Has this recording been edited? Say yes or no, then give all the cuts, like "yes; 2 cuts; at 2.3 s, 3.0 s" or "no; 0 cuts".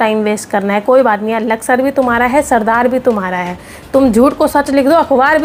no; 0 cuts